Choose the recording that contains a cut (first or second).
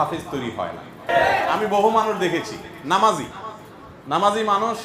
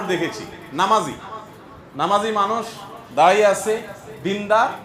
first